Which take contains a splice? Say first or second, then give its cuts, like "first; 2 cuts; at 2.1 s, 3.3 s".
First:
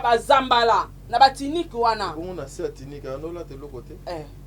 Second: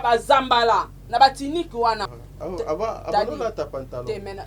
second; 1 cut; at 2.1 s